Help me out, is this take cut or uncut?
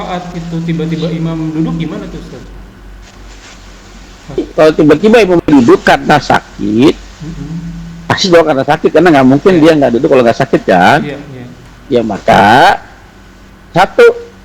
cut